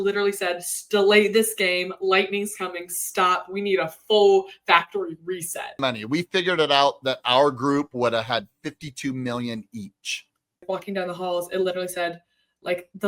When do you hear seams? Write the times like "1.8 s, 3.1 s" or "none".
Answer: 5.8 s, 10.6 s